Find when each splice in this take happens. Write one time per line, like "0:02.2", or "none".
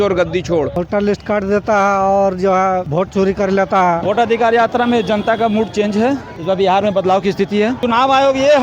0:01.1
0:02.9
0:04.0
0:06.3
0:07.8